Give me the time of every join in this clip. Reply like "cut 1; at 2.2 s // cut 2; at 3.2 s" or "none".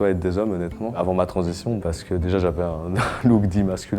cut 1; at 1.0 s // cut 2; at 1.8 s